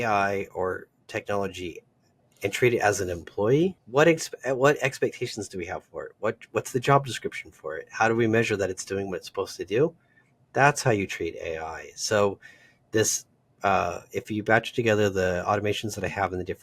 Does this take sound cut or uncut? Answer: cut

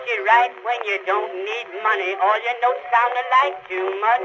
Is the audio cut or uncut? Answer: uncut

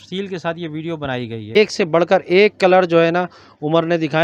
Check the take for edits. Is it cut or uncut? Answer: cut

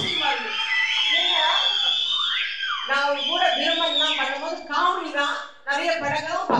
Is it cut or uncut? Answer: uncut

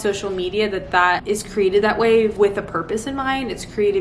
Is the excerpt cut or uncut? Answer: cut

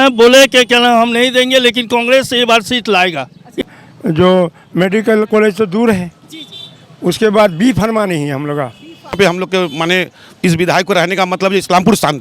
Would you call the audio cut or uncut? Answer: cut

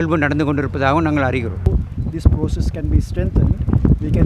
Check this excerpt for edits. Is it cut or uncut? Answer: cut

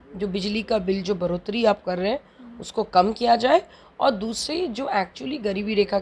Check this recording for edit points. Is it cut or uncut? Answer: uncut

